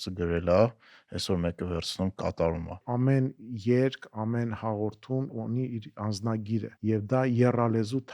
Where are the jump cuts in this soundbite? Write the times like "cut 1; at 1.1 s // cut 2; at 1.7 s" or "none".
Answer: cut 1; at 2.8 s // cut 2; at 5.3 s // cut 3; at 6.7 s